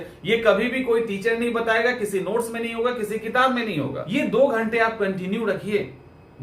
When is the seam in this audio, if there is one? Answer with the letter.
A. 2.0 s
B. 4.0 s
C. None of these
B